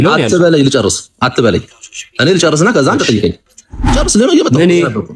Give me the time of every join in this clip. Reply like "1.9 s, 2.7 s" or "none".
3.9 s